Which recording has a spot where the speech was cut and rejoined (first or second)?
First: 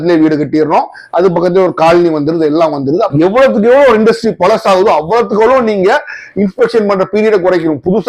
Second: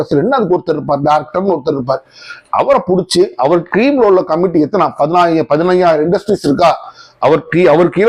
first